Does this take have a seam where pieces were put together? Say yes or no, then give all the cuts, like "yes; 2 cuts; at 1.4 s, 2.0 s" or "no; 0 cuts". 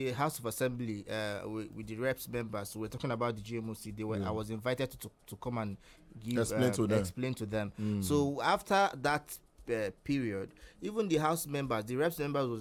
no; 0 cuts